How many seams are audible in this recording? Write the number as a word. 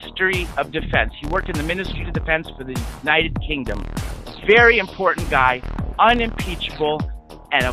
zero